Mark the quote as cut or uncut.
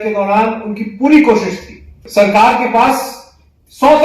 cut